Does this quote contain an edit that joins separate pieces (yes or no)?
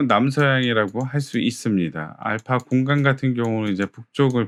no